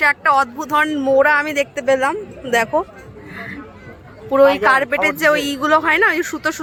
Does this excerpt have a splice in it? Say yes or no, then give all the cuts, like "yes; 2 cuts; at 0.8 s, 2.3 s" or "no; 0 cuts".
no; 0 cuts